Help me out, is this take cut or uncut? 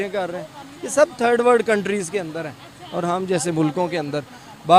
uncut